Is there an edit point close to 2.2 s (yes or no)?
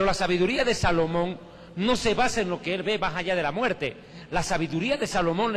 yes